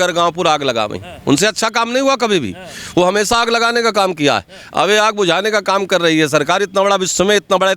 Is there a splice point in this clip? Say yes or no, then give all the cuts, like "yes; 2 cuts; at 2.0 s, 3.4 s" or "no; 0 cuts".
no; 0 cuts